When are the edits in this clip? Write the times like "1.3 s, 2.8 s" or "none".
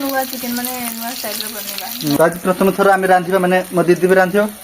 2.2 s